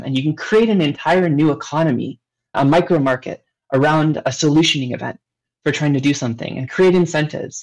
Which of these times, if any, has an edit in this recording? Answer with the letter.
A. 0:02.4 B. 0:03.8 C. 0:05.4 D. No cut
D